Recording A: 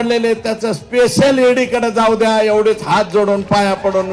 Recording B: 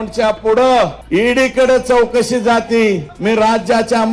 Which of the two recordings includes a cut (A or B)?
B